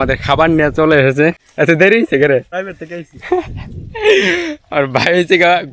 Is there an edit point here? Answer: yes; 2 cuts; at 1.4 s, 2.6 s

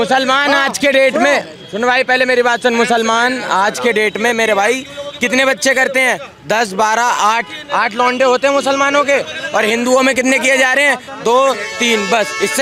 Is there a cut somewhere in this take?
no; 0 cuts

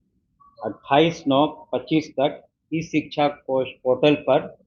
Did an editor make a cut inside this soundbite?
no; 0 cuts

